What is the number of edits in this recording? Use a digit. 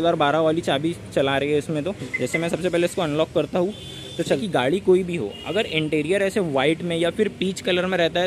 2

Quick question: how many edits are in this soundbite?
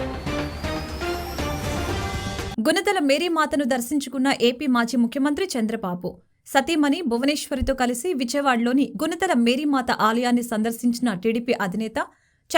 1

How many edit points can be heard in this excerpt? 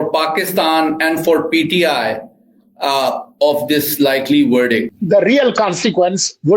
1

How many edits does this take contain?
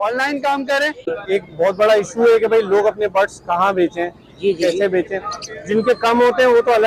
1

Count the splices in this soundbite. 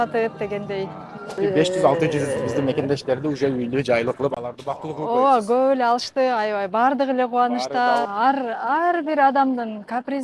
2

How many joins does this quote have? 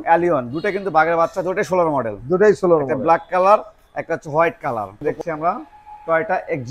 1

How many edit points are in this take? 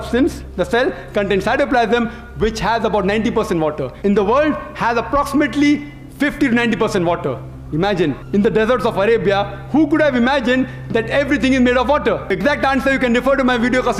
3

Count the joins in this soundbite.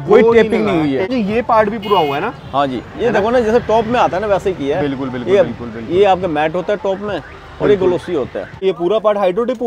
2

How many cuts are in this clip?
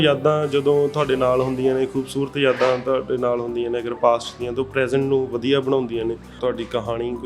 1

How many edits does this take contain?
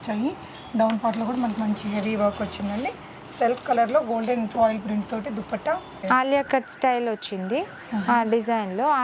1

